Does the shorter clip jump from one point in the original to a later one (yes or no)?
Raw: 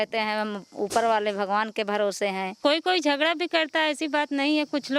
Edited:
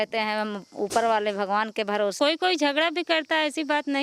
yes